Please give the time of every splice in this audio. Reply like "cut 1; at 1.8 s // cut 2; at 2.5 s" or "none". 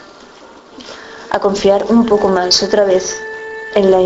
cut 1; at 2.3 s